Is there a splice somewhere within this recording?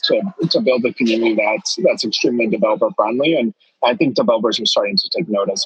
no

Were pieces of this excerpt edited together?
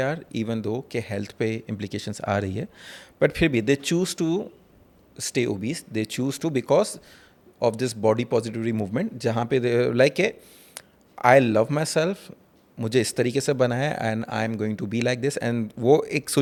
no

